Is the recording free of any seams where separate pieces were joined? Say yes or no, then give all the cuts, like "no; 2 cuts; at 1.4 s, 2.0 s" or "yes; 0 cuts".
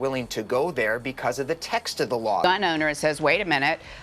no; 1 cut; at 2.4 s